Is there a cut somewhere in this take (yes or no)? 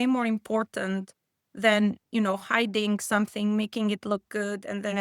no